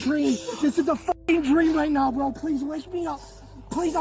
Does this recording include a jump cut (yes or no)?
no